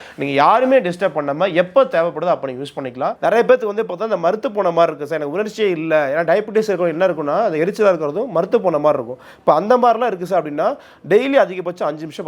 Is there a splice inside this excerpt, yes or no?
yes